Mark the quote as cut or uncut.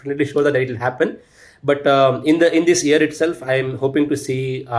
uncut